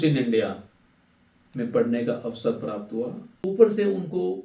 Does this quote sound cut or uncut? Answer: cut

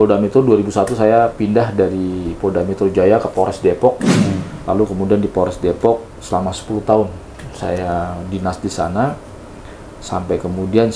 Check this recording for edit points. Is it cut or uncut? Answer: uncut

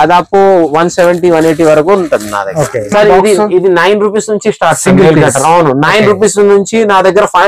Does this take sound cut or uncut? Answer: cut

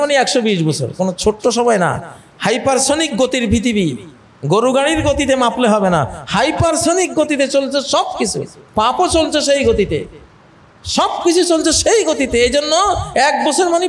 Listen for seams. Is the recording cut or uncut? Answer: uncut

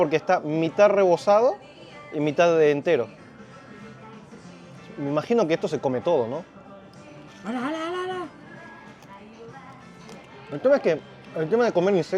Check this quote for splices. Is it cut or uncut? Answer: uncut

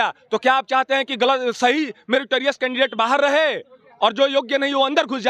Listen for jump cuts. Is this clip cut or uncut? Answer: uncut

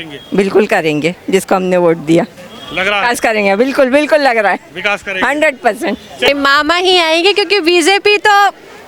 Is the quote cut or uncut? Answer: cut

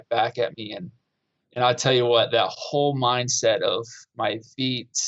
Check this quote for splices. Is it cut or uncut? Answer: uncut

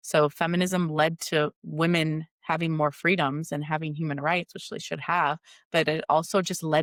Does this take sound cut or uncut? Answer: uncut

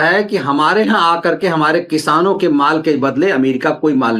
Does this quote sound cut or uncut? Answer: uncut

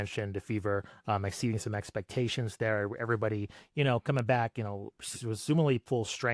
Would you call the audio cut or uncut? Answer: uncut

